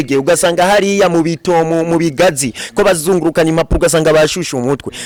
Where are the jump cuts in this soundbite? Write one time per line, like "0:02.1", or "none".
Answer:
none